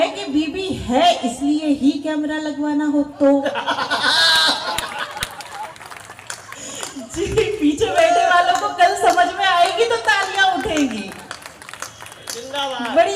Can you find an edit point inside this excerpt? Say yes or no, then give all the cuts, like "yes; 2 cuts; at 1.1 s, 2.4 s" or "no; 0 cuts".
no; 0 cuts